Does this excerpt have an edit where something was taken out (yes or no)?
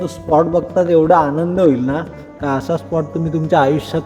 no